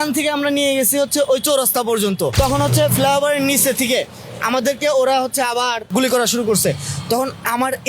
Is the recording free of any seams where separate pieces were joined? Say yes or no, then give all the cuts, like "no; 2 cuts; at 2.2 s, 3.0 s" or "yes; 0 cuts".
no; 2 cuts; at 2.3 s, 5.9 s